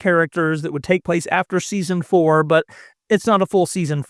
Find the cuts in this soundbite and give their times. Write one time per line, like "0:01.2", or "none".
none